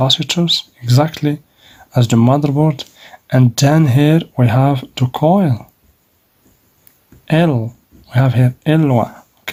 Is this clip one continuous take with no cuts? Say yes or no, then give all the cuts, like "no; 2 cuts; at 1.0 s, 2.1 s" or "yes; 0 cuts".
yes; 0 cuts